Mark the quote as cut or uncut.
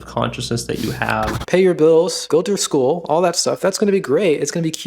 cut